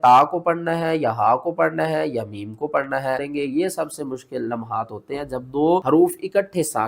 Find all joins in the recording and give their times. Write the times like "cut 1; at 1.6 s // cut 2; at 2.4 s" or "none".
cut 1; at 3.3 s // cut 2; at 5.8 s